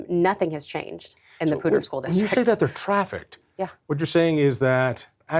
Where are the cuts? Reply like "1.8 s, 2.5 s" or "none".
none